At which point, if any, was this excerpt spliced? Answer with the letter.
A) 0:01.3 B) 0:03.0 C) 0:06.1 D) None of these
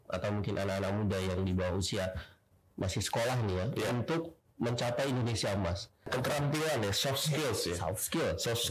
C